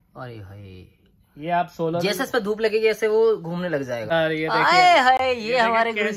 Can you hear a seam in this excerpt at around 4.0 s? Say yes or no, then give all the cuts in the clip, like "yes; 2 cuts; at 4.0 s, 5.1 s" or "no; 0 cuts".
yes; 1 cut; at 4.0 s